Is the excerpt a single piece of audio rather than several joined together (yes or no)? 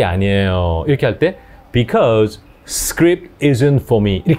yes